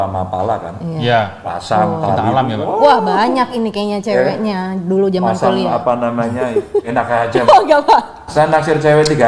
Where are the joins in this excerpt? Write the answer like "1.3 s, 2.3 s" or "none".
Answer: none

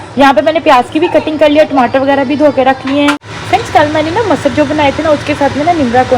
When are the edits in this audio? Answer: 3.3 s

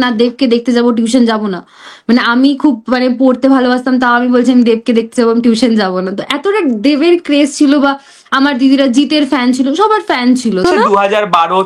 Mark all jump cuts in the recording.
10.6 s

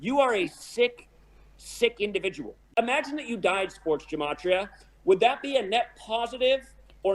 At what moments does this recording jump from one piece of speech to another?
2.5 s

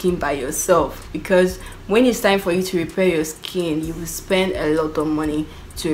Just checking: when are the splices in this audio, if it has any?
none

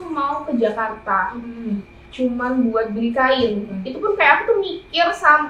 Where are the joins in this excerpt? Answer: none

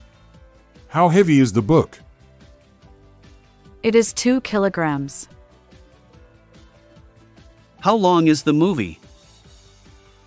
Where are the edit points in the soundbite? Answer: 0.9 s, 2.0 s, 3.8 s, 5.2 s, 7.8 s

